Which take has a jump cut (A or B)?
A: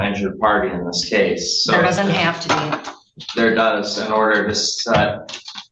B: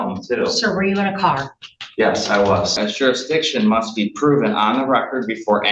B